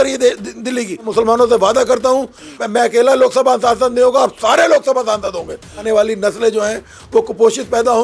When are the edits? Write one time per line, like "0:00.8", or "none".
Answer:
0:01.0
0:02.6
0:05.8